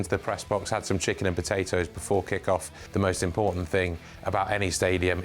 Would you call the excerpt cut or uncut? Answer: cut